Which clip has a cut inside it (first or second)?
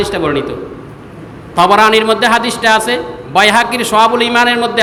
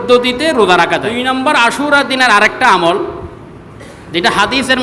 second